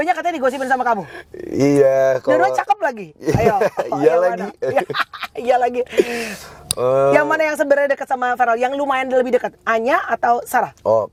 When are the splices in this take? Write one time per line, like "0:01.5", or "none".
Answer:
none